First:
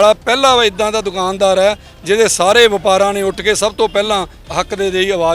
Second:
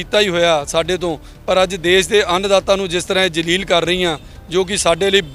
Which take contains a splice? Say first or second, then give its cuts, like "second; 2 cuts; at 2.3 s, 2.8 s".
first; 1 cut; at 4.4 s